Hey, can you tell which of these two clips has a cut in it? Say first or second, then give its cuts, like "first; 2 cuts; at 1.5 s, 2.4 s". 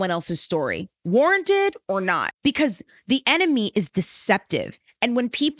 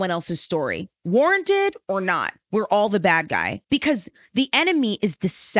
first; 1 cut; at 2.3 s